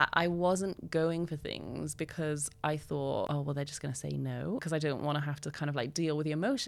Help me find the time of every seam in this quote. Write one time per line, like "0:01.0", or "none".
0:03.3
0:04.6